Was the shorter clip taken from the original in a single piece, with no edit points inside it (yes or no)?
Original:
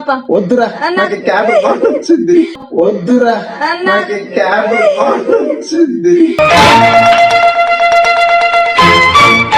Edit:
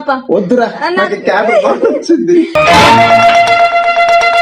no